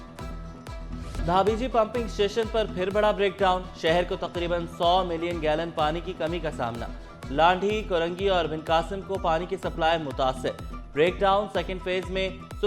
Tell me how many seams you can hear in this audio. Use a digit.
1